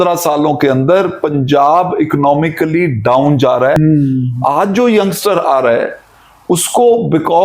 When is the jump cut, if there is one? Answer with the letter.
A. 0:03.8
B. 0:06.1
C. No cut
A